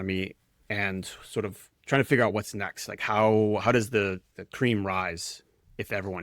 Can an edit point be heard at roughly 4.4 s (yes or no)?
yes